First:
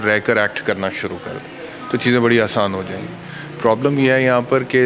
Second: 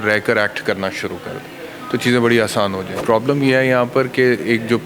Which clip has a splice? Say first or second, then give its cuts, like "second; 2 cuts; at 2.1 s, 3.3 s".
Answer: second; 1 cut; at 2.9 s